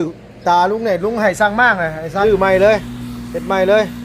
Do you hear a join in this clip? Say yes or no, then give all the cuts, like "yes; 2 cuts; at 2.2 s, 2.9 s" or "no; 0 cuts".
yes; 1 cut; at 2.2 s